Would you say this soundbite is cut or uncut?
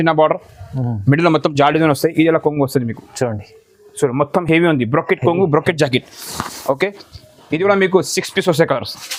uncut